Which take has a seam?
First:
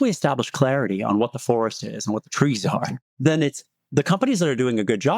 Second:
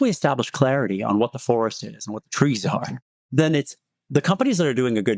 first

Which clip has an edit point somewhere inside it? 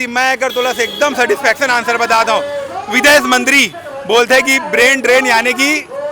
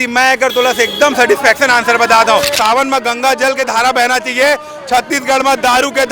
second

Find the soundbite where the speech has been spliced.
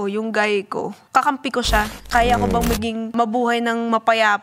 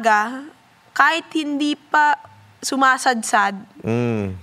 first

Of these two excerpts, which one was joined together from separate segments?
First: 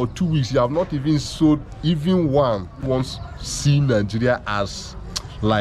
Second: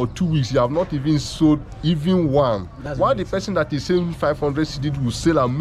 first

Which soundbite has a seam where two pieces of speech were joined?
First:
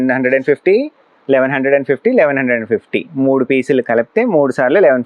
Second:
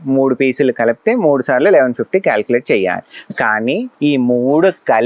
second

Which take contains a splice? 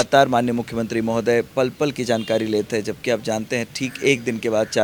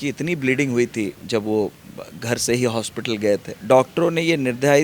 second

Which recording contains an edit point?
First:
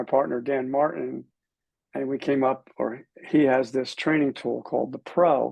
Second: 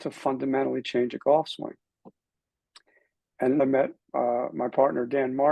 second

